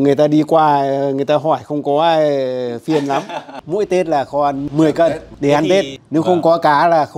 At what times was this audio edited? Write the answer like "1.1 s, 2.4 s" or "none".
3.6 s, 5.9 s